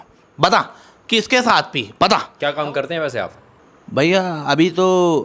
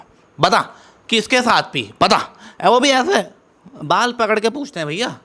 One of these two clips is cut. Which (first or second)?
first